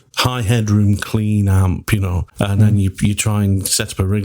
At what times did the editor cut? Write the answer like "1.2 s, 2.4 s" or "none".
2.2 s